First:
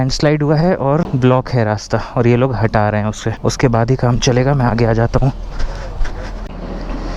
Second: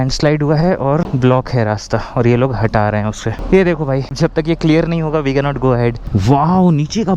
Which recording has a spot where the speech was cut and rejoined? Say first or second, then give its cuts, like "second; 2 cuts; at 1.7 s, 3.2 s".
second; 3 cuts; at 3.3 s, 4.2 s, 6.0 s